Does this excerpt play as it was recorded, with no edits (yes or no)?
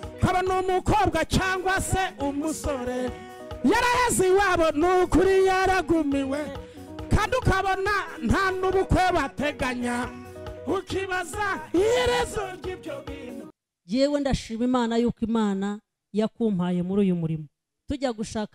no